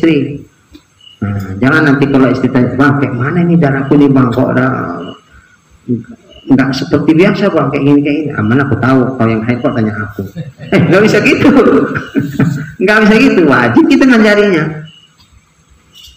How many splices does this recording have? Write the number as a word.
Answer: zero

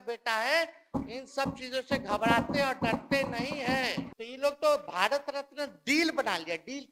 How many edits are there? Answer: one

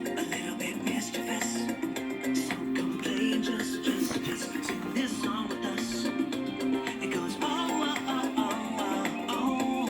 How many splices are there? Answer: one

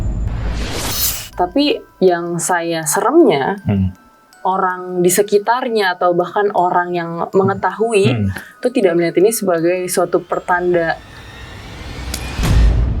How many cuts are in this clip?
one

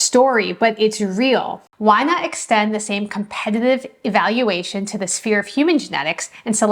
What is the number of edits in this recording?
one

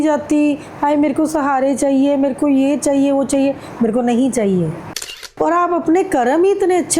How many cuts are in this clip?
one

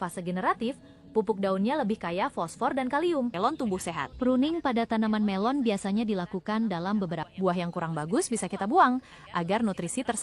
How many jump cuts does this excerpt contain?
two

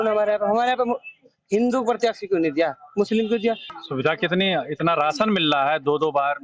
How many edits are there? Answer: one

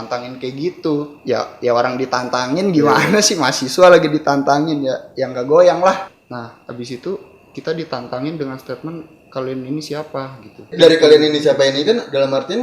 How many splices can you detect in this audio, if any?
three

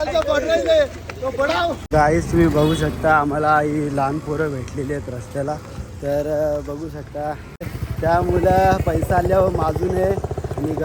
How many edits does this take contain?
two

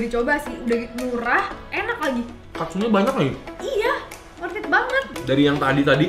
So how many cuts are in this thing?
one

